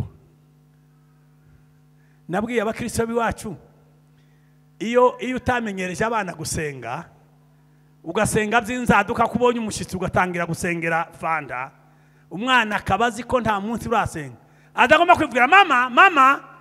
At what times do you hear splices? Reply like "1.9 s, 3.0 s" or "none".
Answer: none